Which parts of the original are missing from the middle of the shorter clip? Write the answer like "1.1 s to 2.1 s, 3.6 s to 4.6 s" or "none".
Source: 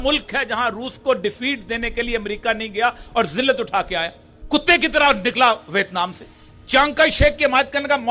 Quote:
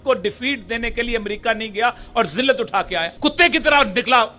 4.1 s to 4.4 s

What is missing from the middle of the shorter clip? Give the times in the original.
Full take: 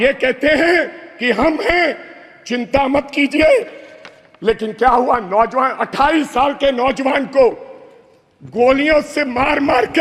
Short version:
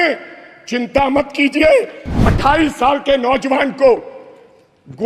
4.1 s to 5.8 s

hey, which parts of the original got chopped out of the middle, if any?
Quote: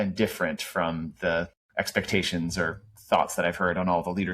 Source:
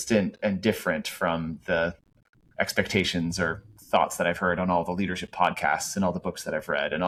2.1 s to 2.4 s

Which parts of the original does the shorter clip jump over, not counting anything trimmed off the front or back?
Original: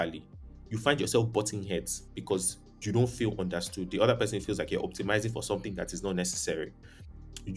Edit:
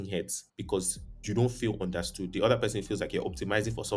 none

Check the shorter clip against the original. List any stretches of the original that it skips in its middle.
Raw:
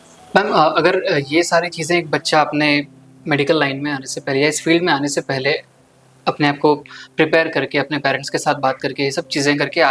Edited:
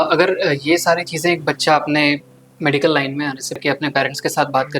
4.2 s to 7.7 s

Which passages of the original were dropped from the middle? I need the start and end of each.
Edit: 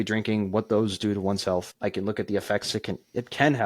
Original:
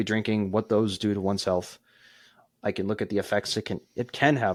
1.7 s to 2.5 s

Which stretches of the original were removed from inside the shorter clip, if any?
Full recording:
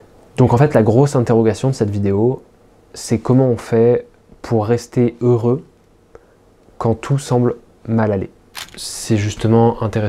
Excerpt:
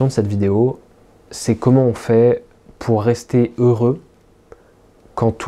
none

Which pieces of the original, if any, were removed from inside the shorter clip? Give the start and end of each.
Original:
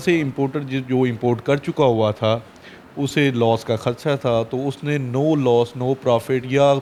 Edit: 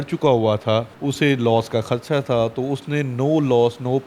2.5 s to 2.9 s

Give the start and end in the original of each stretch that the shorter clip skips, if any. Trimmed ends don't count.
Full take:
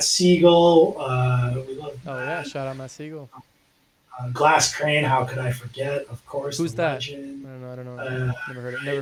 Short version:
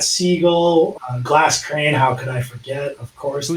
1.1 s to 4.2 s

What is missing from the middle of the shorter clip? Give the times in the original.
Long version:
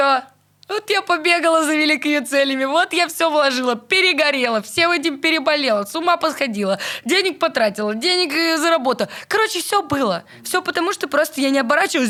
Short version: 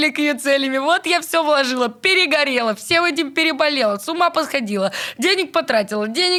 none

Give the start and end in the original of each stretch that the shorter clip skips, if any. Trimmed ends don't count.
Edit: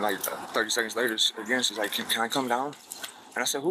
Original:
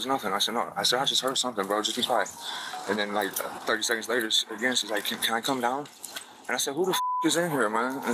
none

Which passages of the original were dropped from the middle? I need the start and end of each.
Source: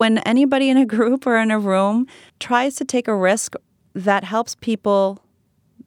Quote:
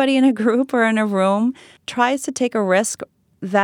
none

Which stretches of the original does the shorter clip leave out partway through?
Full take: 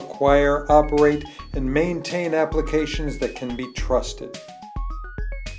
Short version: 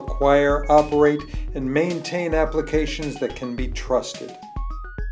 none

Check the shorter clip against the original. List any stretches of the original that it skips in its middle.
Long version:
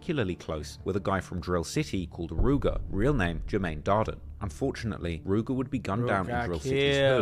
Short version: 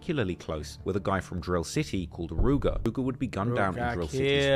2.9 s to 5.4 s

